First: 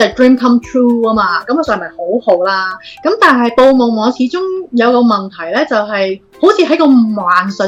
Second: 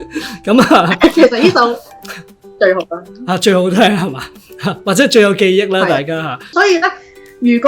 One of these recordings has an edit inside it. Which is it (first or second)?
second